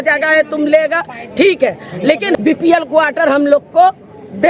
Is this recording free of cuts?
no; 1 cut; at 2.4 s

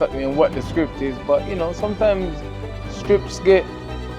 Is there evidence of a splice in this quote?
no; 0 cuts

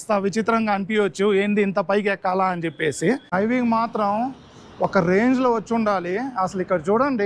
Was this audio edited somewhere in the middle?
yes; 1 cut; at 3.3 s

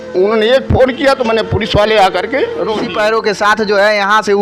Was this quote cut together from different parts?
yes; 1 cut; at 2.8 s

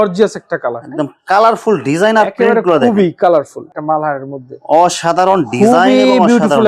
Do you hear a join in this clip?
yes; 1 cut; at 3.7 s

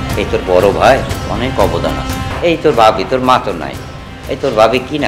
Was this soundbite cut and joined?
yes; 1 cut; at 2.3 s

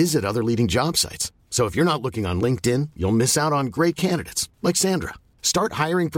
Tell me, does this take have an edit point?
no; 0 cuts

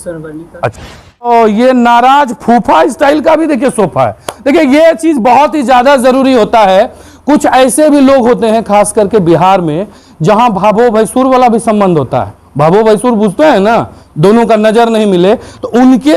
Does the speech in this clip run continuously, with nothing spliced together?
no; 1 cut; at 1.2 s

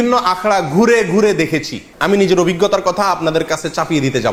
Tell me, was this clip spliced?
no; 0 cuts

